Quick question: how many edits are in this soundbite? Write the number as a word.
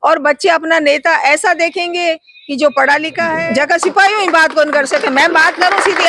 one